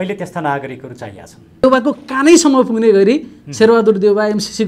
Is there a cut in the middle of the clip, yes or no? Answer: yes